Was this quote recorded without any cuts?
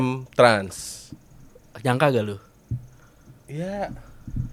yes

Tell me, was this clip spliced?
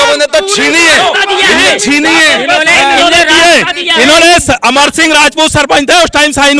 no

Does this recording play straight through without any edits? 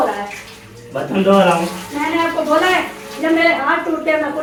yes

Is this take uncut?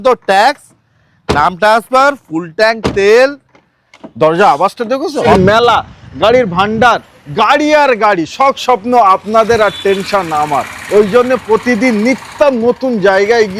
no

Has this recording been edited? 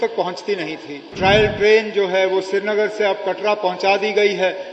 yes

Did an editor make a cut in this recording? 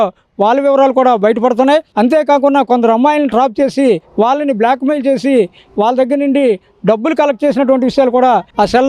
no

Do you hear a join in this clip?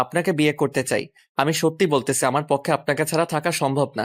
yes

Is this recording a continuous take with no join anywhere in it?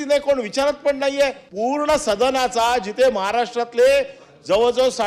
no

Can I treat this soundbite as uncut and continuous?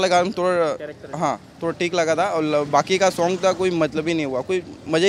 yes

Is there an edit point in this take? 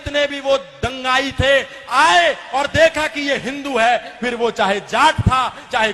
no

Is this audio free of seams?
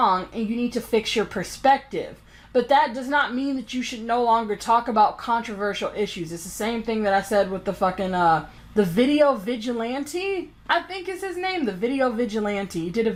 yes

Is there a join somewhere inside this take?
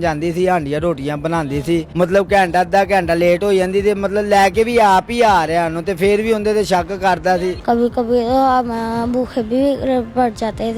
yes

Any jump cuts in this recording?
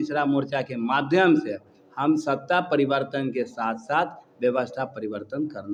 no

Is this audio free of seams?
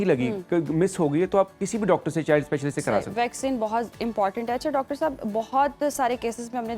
yes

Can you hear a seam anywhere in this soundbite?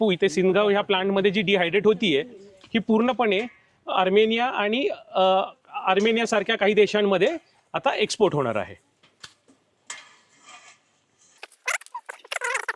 no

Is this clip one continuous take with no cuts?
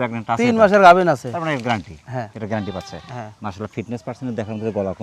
yes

